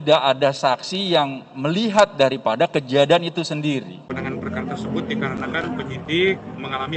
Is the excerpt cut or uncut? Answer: cut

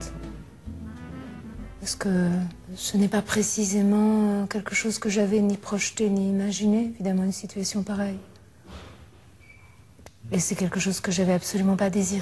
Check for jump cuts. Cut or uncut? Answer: cut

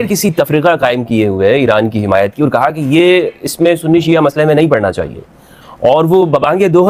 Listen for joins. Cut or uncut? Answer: uncut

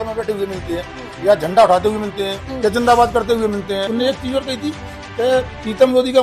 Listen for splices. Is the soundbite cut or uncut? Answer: cut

